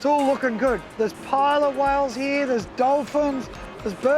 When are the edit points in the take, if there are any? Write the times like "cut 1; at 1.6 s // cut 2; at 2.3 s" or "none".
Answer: cut 1; at 0.9 s